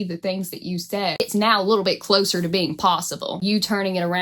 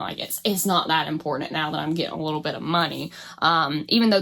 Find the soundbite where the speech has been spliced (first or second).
first